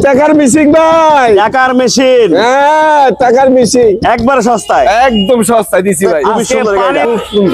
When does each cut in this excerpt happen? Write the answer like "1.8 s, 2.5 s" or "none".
6.4 s